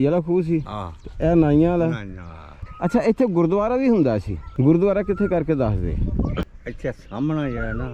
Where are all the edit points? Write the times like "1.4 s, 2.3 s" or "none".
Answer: 2.6 s